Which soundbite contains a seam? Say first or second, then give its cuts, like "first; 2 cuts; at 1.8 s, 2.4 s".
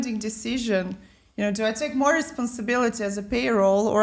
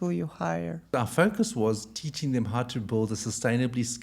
second; 1 cut; at 0.9 s